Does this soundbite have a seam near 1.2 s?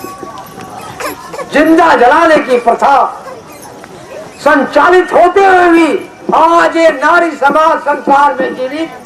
no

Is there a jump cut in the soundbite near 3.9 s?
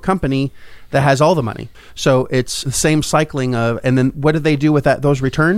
no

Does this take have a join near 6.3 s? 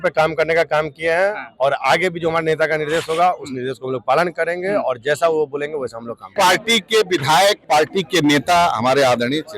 yes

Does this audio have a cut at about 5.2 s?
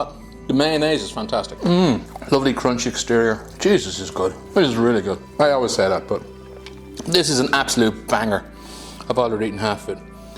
yes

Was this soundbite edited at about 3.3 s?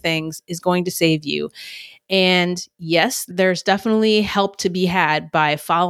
yes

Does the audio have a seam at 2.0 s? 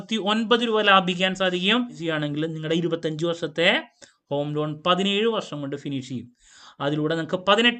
yes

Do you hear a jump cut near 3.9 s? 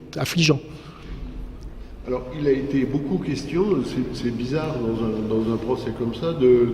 yes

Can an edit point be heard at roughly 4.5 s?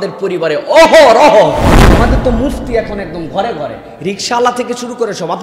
no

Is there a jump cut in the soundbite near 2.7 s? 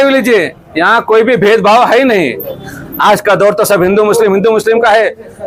no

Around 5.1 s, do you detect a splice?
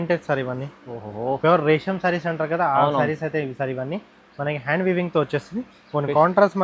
no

